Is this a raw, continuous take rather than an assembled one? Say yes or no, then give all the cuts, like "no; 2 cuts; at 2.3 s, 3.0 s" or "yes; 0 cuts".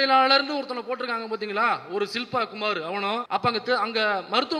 no; 1 cut; at 3.2 s